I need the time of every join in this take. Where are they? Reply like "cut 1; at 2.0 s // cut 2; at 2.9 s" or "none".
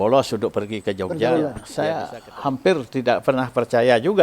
cut 1; at 1.2 s